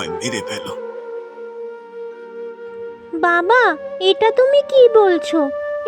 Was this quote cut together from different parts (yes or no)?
no